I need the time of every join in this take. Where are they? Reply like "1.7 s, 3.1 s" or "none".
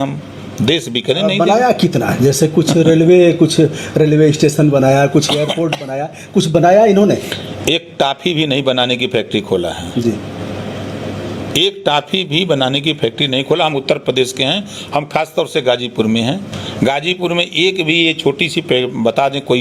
none